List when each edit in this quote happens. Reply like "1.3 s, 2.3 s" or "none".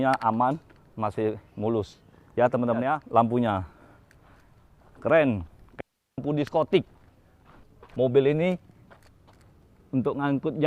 3.0 s